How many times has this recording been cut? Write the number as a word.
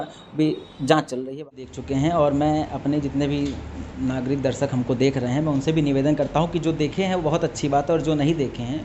one